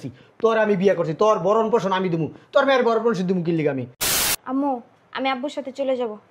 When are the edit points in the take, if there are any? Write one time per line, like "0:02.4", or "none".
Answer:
0:03.9